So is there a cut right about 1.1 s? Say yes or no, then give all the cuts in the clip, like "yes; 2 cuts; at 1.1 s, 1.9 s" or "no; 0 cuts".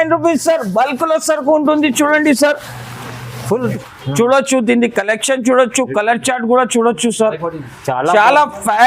no; 1 cut; at 3.7 s